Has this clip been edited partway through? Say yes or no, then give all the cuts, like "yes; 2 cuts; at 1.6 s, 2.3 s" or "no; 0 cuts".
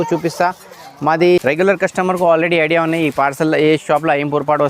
yes; 1 cut; at 1.4 s